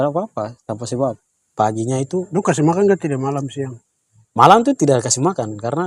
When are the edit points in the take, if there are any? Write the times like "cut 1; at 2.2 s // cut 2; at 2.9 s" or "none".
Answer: cut 1; at 1.5 s